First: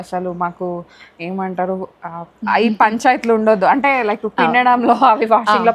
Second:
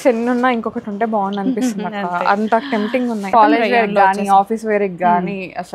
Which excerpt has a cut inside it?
second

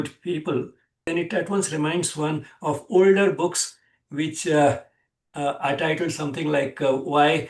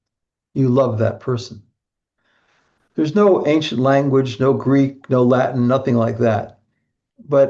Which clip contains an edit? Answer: first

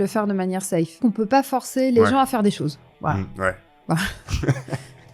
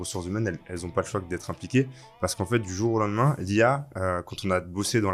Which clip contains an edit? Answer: first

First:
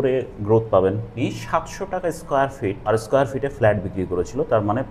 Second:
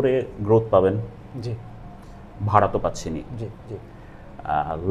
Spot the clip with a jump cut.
first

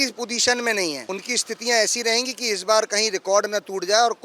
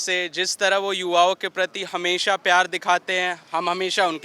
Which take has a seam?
first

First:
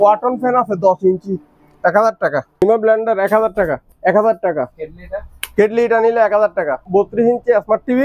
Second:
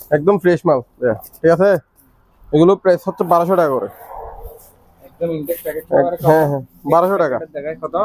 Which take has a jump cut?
first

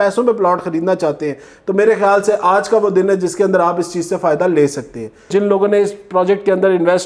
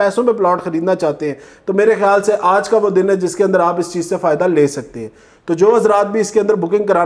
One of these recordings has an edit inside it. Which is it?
first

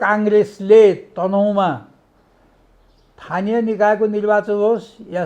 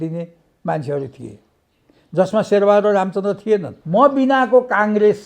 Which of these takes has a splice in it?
second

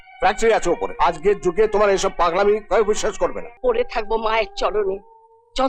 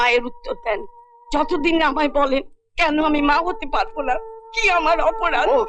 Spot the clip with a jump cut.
first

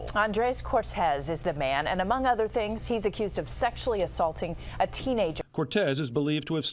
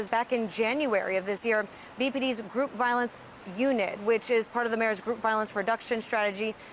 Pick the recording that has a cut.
first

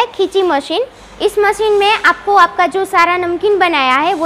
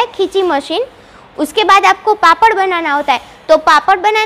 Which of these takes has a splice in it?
first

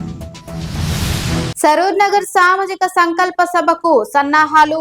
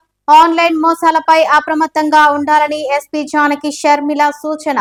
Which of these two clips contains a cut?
first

